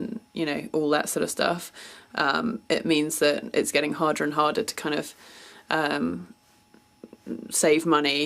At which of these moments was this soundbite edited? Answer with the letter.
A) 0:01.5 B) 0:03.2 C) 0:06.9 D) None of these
B